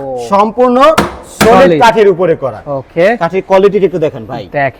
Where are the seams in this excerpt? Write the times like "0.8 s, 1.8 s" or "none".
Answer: none